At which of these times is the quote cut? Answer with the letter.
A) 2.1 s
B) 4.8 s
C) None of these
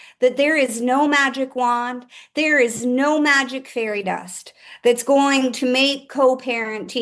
C